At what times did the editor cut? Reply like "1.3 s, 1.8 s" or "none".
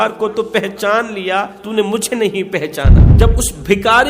1.6 s, 3.1 s